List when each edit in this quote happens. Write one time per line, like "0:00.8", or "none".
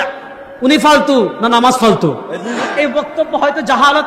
0:02.6